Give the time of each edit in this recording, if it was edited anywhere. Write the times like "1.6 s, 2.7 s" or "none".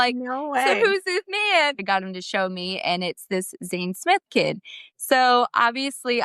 1.8 s